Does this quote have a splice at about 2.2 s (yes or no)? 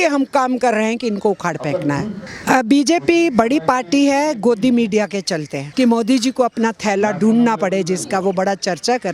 yes